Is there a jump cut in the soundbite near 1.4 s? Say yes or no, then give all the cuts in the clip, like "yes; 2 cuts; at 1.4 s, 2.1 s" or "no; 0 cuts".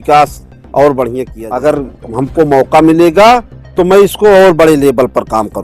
yes; 1 cut; at 1.4 s